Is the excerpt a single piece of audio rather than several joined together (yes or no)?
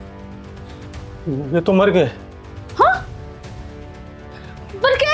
yes